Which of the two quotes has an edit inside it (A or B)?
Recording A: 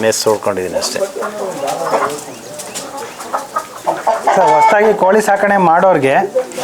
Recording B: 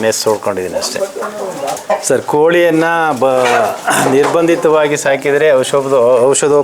B